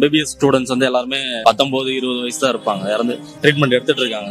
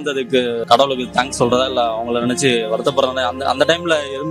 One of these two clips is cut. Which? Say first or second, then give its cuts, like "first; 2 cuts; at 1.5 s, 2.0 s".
first; 2 cuts; at 1.3 s, 3.3 s